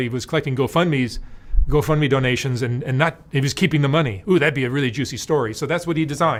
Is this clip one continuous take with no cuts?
yes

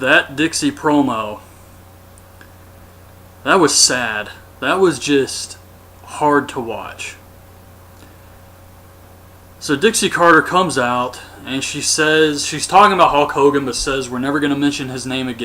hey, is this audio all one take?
no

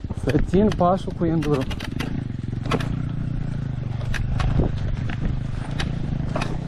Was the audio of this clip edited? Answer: no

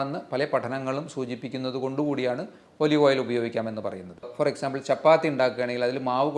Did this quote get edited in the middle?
yes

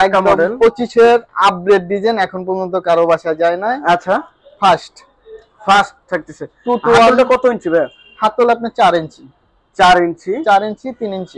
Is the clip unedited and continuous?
yes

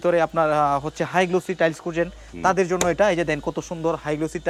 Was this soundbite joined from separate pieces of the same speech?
no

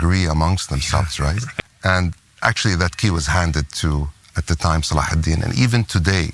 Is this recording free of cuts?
no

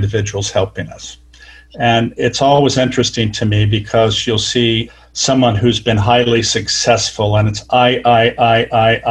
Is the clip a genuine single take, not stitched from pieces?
no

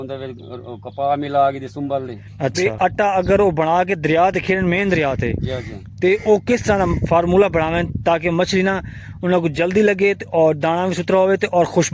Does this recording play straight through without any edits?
no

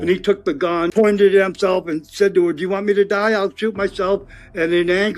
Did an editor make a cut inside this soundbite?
yes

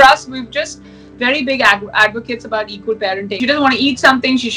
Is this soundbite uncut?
no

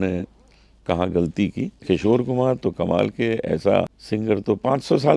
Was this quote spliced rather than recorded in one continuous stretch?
yes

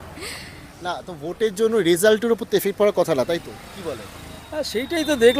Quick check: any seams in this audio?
no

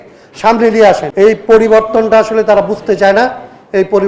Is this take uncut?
no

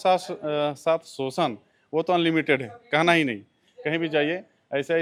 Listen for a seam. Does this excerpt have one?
no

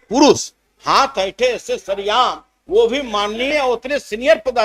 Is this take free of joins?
yes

